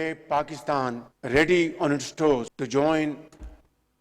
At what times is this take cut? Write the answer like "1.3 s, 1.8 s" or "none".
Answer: 1.1 s, 2.6 s